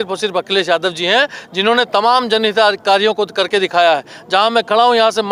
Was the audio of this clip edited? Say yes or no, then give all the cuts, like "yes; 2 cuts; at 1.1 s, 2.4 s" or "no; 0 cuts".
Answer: no; 0 cuts